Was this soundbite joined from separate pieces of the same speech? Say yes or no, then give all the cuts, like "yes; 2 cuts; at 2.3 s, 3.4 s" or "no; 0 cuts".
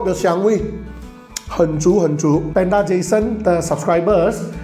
yes; 1 cut; at 2.5 s